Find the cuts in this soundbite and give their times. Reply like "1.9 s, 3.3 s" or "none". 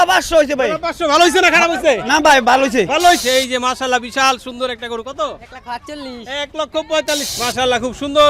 3.2 s, 7.3 s